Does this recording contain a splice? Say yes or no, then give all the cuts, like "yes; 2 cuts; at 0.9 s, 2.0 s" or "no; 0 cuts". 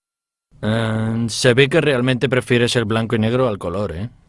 yes; 1 cut; at 1.8 s